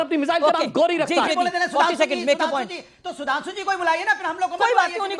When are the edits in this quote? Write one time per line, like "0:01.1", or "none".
0:01.3